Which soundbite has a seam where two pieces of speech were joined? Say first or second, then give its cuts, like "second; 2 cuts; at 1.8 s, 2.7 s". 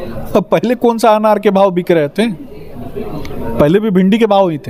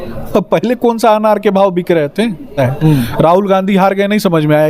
second; 1 cut; at 2.5 s